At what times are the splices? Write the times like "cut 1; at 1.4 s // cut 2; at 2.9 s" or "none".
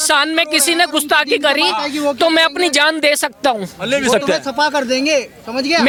none